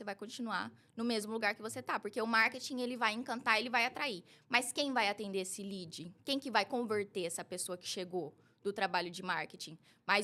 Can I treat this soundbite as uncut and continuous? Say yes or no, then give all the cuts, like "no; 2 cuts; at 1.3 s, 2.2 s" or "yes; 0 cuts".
yes; 0 cuts